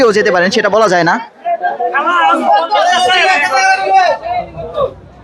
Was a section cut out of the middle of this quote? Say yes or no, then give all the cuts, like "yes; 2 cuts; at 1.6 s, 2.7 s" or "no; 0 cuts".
no; 0 cuts